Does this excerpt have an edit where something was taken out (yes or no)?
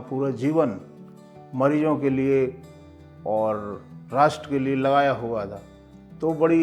no